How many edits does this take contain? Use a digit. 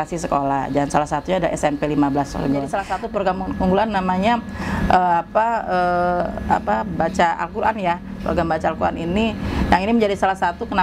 1